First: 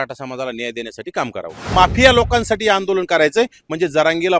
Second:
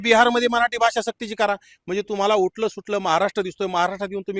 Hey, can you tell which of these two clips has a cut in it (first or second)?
first